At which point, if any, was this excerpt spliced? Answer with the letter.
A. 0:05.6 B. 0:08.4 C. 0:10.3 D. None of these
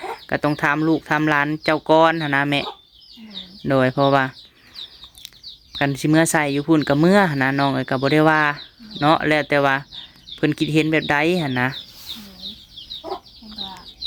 D